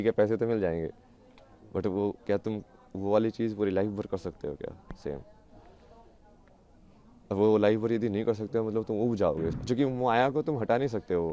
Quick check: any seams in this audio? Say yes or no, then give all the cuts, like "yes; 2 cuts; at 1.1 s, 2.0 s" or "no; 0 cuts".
yes; 1 cut; at 9.6 s